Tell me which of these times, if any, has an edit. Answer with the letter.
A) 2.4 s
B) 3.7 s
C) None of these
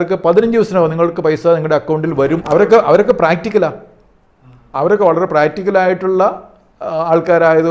A